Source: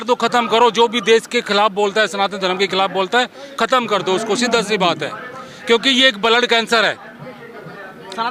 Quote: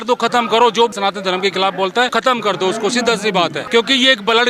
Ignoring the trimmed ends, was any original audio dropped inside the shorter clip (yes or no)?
yes